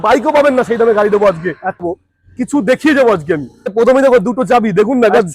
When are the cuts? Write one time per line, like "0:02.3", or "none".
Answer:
0:01.8
0:03.7